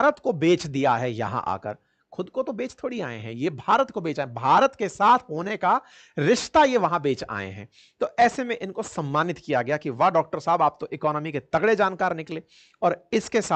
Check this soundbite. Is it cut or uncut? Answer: uncut